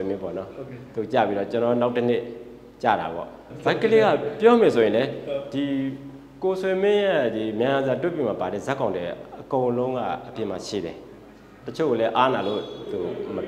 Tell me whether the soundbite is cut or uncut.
cut